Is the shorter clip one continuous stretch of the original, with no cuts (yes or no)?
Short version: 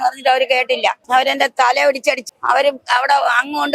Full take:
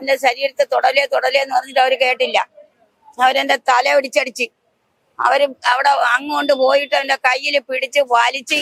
no